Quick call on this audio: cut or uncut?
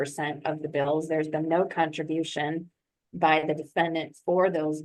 uncut